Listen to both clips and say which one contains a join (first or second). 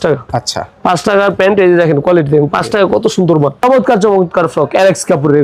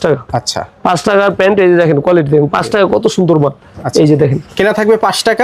first